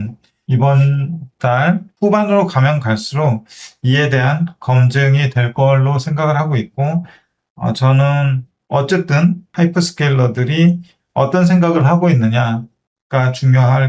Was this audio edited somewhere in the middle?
yes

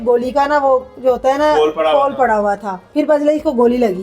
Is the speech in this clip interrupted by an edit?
yes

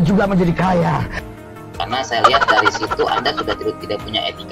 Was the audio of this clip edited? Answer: no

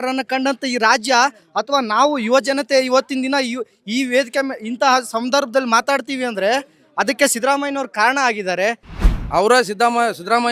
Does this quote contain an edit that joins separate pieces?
yes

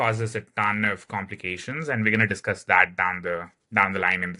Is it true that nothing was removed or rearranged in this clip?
yes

